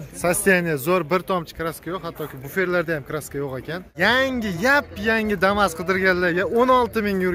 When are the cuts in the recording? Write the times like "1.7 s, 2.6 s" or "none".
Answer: 3.9 s